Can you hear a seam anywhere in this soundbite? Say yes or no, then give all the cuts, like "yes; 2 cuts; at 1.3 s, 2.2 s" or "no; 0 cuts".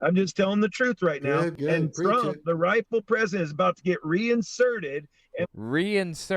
yes; 1 cut; at 1.6 s